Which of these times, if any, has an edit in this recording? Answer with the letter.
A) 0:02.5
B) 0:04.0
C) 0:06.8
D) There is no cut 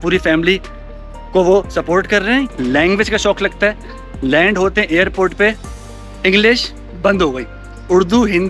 A